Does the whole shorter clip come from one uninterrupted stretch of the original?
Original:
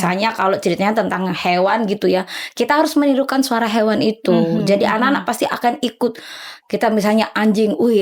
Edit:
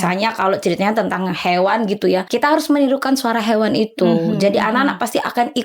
no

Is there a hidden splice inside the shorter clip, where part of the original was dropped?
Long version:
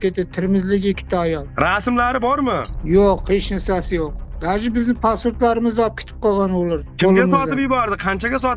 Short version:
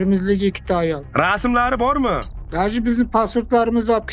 yes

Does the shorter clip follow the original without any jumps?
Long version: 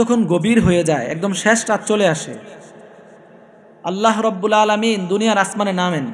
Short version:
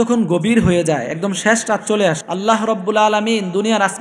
no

